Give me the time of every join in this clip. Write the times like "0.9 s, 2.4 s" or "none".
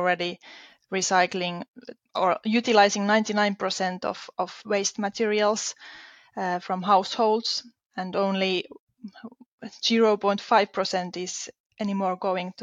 none